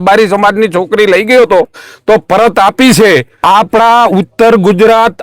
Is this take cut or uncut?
cut